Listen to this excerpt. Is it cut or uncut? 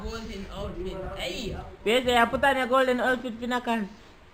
uncut